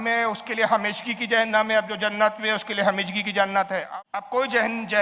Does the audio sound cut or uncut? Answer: cut